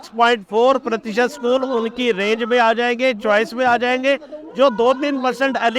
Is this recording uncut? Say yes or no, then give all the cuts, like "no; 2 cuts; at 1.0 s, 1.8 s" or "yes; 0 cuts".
yes; 0 cuts